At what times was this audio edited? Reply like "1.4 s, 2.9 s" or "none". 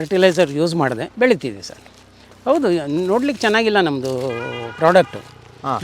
1.1 s

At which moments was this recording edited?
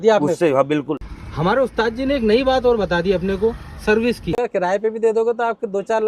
1.0 s, 4.4 s

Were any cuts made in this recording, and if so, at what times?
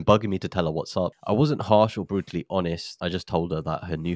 1.2 s, 2.9 s

